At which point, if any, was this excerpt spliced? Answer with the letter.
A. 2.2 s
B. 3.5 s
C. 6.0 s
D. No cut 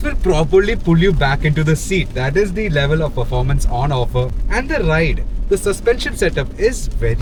D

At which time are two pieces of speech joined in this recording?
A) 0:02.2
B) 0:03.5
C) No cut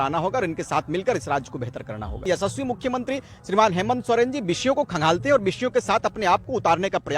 A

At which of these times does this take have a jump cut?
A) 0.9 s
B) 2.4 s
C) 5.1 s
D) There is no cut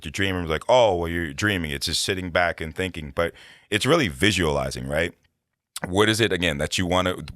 D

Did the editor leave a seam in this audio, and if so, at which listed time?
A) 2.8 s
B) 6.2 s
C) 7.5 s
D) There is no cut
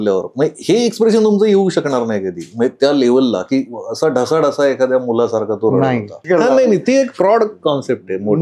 B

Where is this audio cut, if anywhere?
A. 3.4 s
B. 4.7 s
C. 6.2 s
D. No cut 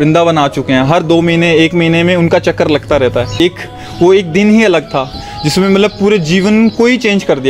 A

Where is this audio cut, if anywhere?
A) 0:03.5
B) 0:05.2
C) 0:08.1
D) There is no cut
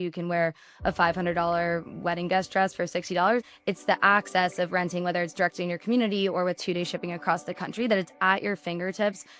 A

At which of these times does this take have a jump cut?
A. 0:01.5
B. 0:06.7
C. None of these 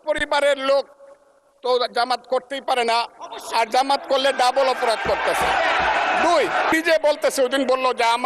B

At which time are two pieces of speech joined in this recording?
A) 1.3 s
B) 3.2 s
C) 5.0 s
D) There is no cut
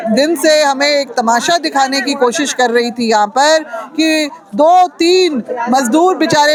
D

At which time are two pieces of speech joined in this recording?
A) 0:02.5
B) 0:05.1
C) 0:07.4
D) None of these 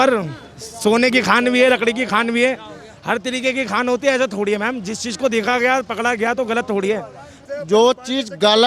C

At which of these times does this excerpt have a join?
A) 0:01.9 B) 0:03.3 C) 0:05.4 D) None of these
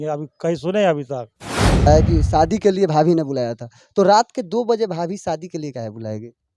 A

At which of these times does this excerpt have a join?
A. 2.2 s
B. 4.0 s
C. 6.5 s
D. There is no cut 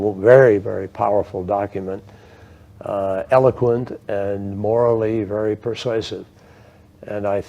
C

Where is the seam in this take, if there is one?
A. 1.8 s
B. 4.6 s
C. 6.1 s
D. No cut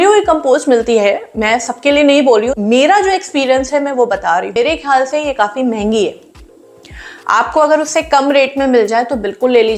B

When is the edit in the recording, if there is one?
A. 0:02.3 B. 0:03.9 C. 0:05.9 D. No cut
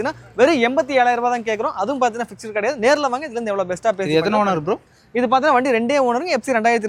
D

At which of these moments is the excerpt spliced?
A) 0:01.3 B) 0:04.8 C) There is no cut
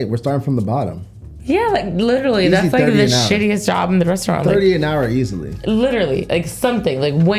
A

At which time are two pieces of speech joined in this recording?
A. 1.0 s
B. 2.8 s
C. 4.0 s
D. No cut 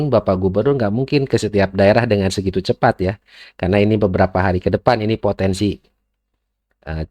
D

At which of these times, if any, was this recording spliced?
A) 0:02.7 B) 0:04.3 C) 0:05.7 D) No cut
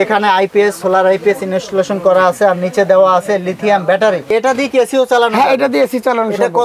B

